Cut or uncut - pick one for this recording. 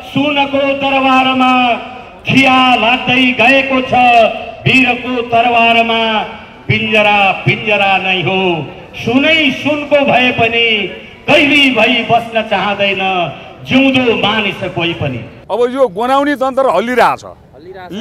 cut